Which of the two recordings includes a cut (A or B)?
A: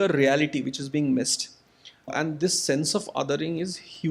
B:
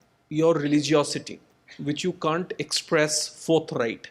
A